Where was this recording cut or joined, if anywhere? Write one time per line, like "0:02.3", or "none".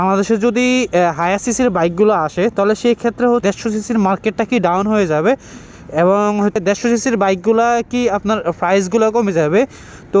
0:03.4
0:06.6